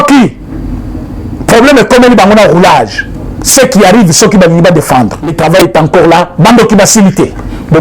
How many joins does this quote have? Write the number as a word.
one